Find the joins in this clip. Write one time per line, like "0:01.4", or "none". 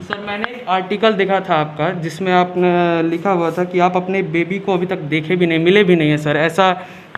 none